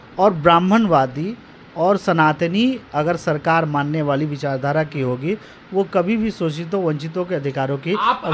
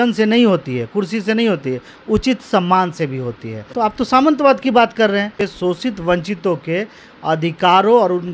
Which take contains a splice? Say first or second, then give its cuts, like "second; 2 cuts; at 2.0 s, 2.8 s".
second; 2 cuts; at 3.6 s, 5.4 s